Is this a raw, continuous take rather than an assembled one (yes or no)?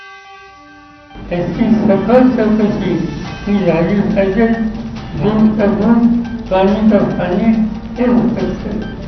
no